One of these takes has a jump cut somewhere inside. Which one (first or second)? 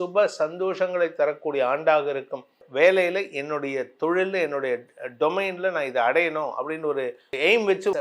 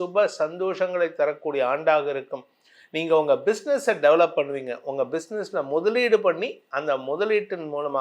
first